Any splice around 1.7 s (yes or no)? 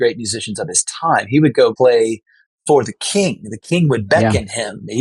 yes